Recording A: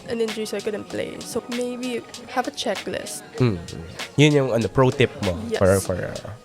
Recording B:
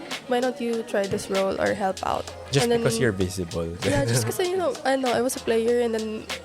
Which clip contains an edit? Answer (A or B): A